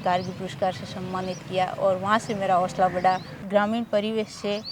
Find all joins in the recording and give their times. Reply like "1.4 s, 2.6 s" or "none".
3.3 s